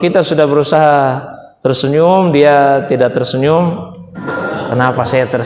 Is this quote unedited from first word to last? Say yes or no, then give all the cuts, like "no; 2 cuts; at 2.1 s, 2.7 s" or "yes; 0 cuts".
no; 1 cut; at 4.1 s